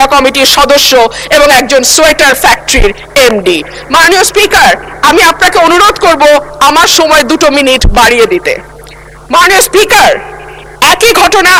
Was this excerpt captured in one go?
yes; 0 cuts

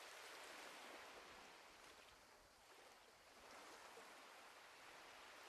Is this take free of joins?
yes; 0 cuts

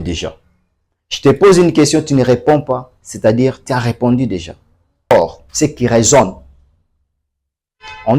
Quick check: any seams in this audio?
yes; 1 cut; at 5.1 s

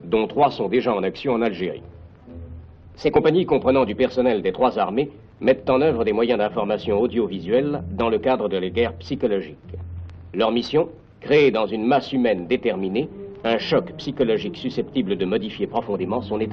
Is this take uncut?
yes; 0 cuts

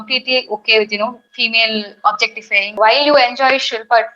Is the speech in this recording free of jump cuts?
no; 1 cut; at 2.8 s

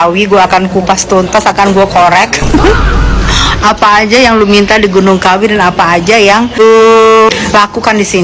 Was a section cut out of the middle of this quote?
yes; 2 cuts; at 6.6 s, 7.3 s

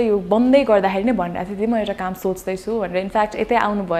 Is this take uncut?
yes; 0 cuts

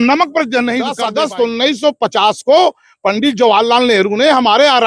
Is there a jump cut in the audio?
yes; 1 cut; at 0.9 s

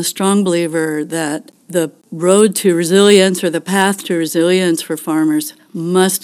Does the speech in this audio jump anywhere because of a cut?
yes; 1 cut; at 1.8 s

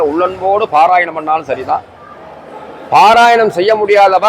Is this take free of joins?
yes; 0 cuts

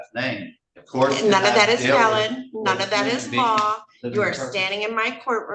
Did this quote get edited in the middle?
no; 0 cuts

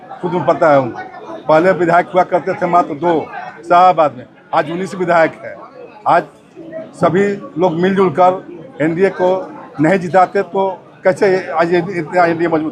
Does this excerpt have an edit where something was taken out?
no; 0 cuts

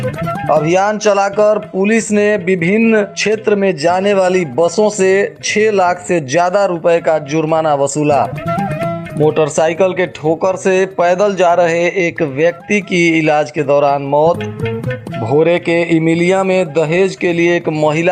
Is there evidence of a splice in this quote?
no; 0 cuts

